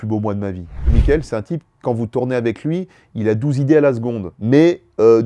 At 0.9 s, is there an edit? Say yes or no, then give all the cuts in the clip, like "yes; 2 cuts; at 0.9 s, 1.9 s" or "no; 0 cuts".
yes; 1 cut; at 0.9 s